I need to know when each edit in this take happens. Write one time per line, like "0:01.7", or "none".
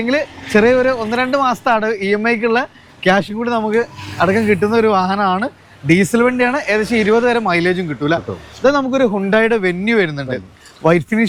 none